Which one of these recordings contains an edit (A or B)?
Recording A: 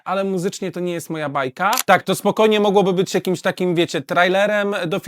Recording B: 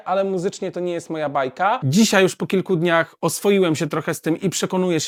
A